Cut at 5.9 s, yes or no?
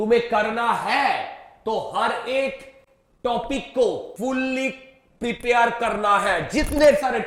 no